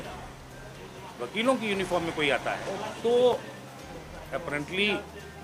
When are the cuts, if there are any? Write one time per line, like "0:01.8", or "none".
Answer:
none

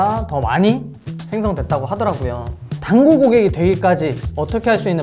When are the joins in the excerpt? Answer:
0:02.7

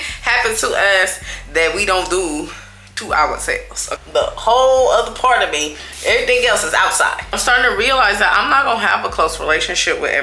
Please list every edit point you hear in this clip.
0:03.9
0:07.4

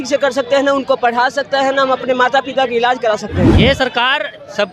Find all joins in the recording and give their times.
0:03.5

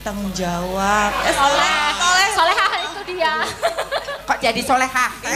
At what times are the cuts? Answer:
0:04.1

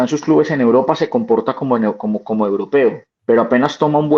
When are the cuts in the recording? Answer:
0:03.1

